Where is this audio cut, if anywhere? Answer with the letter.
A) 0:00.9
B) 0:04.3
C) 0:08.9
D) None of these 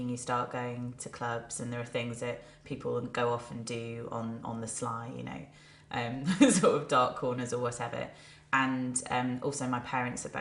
B